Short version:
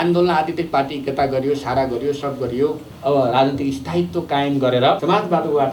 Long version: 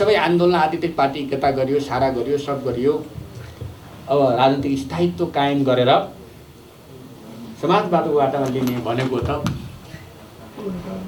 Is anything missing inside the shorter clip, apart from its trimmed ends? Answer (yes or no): yes